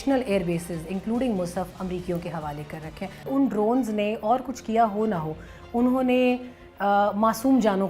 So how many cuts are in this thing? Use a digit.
1